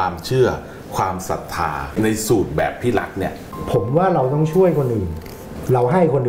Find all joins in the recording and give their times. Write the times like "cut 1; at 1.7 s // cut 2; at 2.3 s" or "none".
cut 1; at 1.9 s // cut 2; at 3.5 s